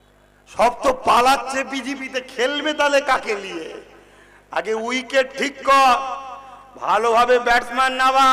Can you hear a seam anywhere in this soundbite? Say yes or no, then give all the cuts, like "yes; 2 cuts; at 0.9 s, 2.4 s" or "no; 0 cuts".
no; 0 cuts